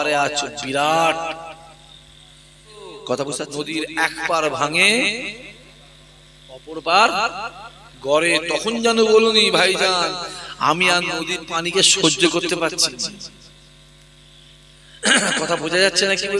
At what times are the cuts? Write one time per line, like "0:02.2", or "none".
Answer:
0:03.5